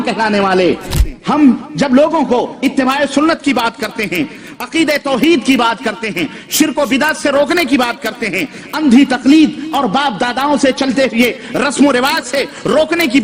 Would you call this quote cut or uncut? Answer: cut